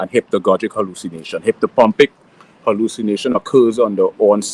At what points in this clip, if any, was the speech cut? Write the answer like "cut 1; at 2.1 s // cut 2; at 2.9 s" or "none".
none